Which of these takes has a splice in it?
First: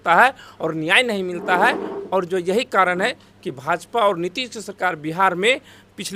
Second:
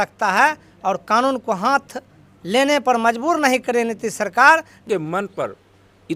second; 1 cut; at 4.8 s

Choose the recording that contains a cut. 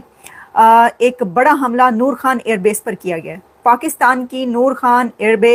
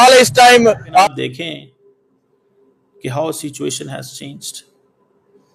second; 1 cut; at 1.0 s

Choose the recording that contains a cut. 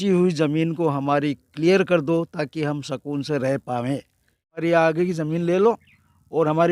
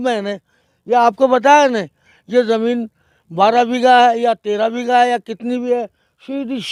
first; 1 cut; at 4.6 s

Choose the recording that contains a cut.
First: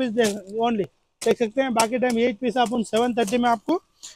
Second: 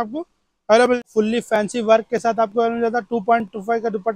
second; 1 cut; at 1.0 s

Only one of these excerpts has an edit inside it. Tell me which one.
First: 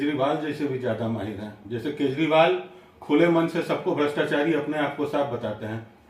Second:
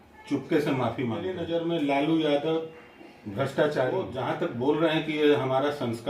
second; 2 cuts; at 1.4 s, 4.1 s

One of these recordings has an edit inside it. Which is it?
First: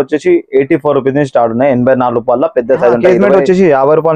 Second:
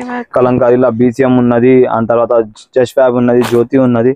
first; 1 cut; at 3.1 s

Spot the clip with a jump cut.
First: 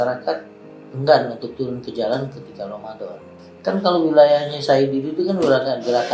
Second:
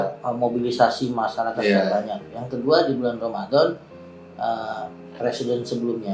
first; 1 cut; at 3.4 s

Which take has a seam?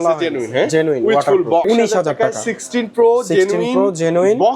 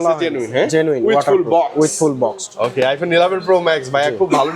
first; 1 cut; at 1.7 s

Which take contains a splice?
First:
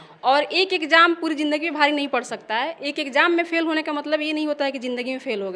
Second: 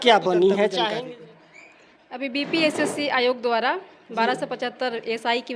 second; 1 cut; at 1.0 s

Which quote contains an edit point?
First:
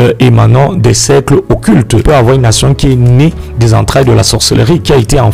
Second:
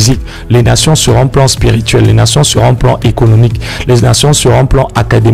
first; 1 cut; at 2.0 s

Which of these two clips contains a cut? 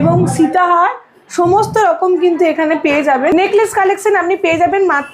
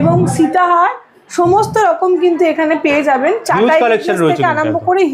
first; 1 cut; at 3.3 s

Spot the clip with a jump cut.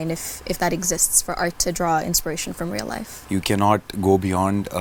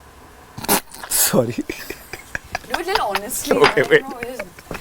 first; 1 cut; at 3.1 s

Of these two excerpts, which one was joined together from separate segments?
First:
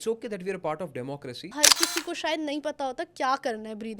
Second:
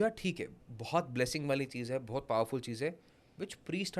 first; 1 cut; at 1.5 s

